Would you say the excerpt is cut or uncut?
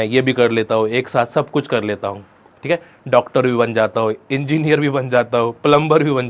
uncut